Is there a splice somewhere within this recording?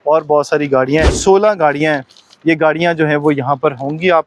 yes; 1 cut; at 1.1 s

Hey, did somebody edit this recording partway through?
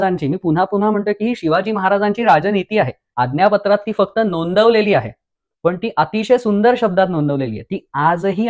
yes; 1 cut; at 3.0 s

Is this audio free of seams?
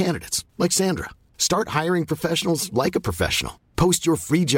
yes; 0 cuts

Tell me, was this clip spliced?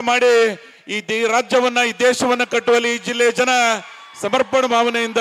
no; 0 cuts

